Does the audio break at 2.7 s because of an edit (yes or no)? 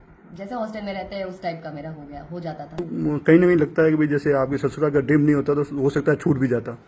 yes